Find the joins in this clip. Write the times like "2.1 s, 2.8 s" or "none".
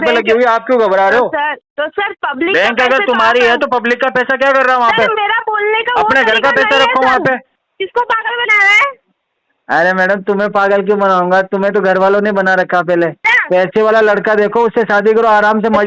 1.6 s, 7.6 s, 13.3 s